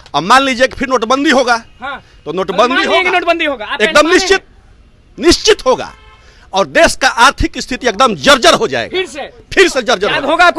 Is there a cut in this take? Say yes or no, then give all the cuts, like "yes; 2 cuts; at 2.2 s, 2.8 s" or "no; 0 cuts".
no; 0 cuts